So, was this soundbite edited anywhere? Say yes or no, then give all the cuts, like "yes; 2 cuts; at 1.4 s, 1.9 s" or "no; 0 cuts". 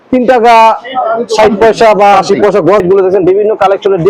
yes; 1 cut; at 2.8 s